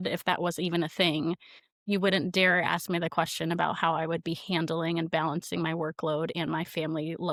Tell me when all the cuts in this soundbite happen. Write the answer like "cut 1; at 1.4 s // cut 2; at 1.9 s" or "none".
none